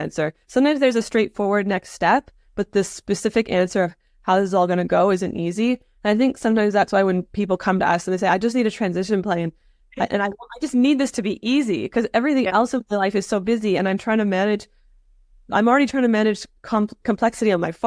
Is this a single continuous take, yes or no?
yes